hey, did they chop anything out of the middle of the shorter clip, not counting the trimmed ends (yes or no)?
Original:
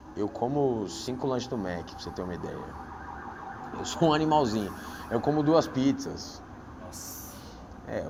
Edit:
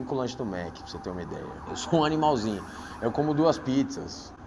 yes